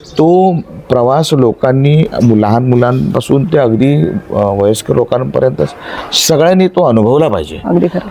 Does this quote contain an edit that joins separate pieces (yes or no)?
no